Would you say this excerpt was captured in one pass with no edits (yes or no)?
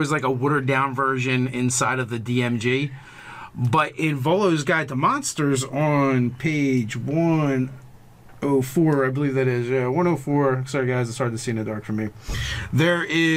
no